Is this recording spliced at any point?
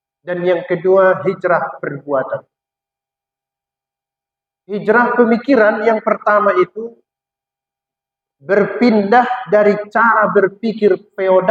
no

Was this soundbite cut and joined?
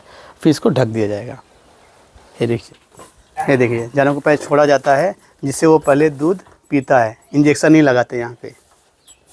yes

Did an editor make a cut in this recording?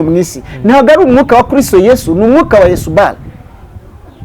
no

